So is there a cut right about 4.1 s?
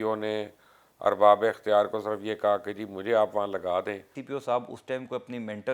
yes; 1 cut; at 4.1 s

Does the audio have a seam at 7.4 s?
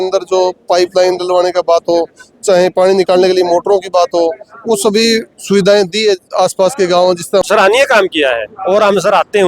yes; 1 cut; at 7.4 s

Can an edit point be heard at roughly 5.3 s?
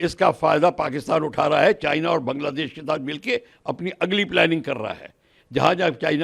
no; 0 cuts

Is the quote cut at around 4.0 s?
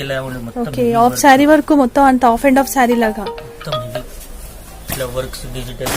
yes; 1 cut; at 4.0 s

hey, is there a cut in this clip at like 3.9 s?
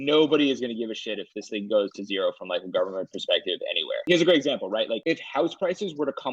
yes; 2 cuts; at 3.9 s, 5.0 s

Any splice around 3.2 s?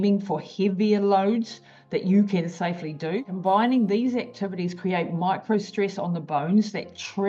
yes; 1 cut; at 3.2 s

